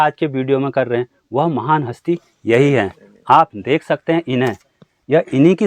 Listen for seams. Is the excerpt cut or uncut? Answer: uncut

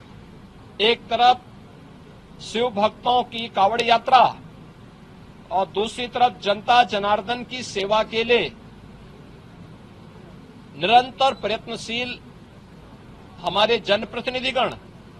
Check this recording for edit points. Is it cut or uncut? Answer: uncut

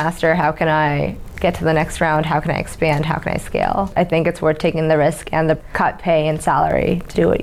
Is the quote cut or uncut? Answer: cut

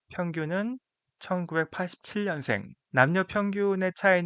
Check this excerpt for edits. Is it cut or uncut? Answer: cut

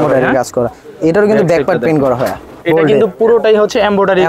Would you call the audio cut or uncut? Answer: cut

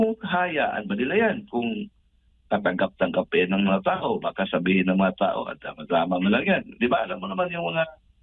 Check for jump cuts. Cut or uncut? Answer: uncut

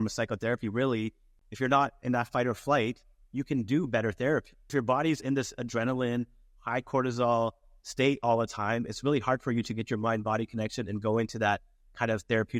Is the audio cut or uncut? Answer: cut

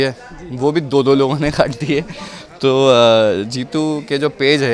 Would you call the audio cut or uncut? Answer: uncut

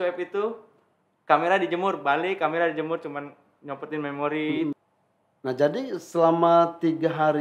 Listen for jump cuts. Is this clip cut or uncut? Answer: cut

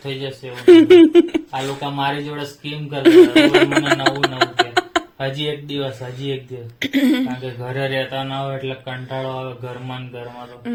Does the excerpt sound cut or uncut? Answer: uncut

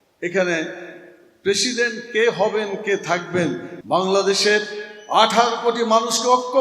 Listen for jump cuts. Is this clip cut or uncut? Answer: cut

